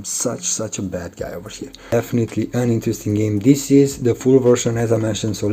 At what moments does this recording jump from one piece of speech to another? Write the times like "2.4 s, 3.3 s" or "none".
1.9 s